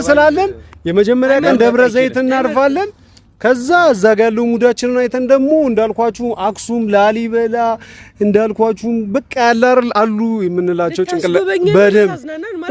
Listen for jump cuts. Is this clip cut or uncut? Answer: uncut